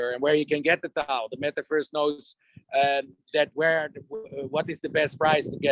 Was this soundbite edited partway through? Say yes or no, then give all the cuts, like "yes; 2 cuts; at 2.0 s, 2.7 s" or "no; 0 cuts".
no; 0 cuts